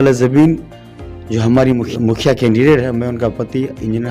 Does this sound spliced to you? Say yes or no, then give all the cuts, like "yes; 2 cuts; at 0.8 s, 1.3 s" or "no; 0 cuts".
yes; 1 cut; at 1.9 s